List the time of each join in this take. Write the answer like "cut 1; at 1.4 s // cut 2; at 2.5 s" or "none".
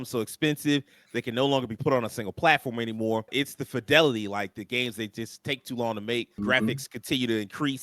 cut 1; at 3.3 s // cut 2; at 6.4 s